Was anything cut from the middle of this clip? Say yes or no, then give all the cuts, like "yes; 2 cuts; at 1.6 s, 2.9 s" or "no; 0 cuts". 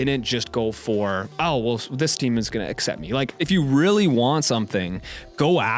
yes; 1 cut; at 3.4 s